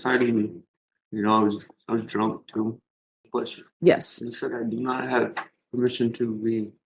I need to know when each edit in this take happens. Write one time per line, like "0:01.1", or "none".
0:03.2